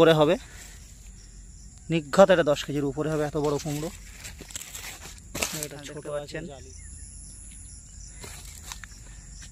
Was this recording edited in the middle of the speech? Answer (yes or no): yes